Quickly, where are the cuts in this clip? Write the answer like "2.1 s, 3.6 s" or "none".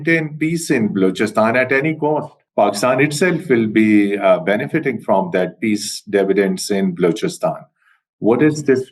2.4 s